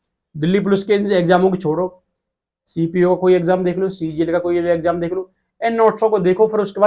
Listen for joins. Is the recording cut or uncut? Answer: uncut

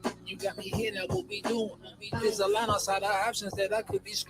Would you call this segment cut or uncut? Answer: cut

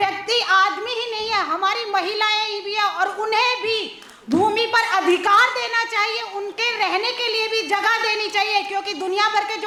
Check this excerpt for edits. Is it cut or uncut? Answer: uncut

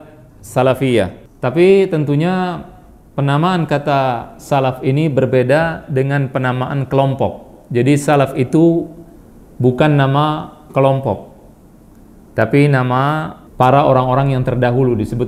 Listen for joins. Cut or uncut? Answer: cut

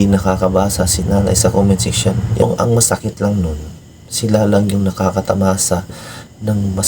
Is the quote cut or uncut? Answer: cut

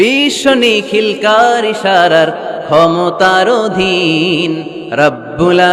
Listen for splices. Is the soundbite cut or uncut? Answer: uncut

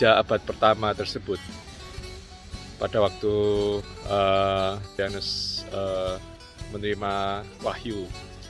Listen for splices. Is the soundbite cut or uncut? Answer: cut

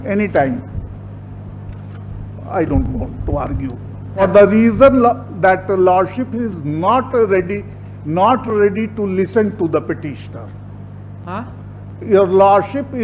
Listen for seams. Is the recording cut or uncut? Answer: cut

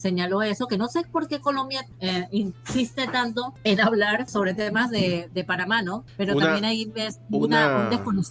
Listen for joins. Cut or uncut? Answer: cut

